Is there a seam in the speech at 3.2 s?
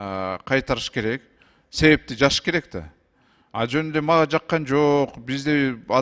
no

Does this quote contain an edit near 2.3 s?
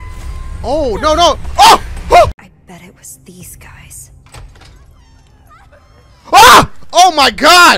yes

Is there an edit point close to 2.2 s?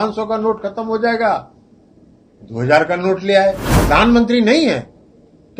no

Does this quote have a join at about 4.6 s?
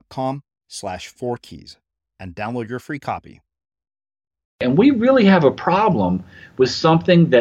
yes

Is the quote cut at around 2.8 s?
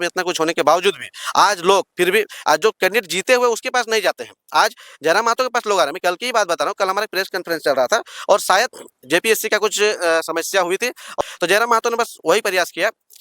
no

